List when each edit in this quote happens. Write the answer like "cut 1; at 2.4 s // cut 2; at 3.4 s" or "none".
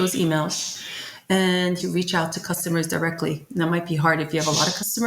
cut 1; at 1.8 s